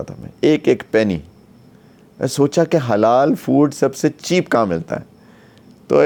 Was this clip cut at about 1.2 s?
no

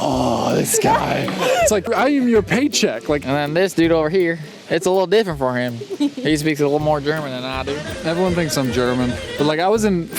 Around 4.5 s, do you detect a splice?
no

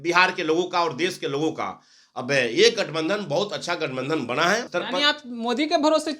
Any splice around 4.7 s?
yes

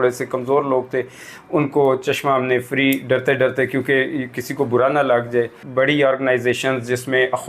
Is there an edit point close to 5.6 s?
yes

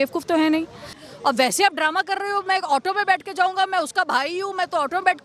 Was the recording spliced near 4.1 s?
no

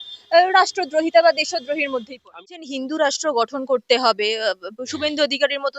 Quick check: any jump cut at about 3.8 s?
no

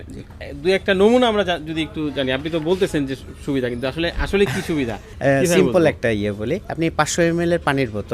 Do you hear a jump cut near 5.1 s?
yes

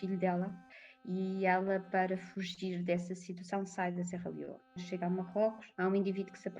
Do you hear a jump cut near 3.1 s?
no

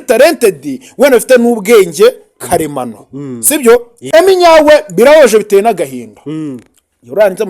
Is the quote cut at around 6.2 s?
no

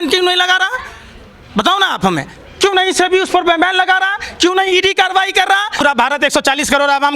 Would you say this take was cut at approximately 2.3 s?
no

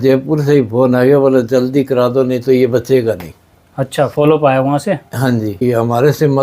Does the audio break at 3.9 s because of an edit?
no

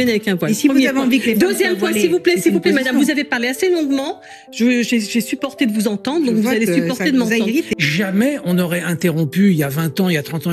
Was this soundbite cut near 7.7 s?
yes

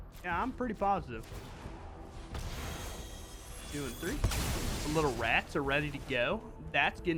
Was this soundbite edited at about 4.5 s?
no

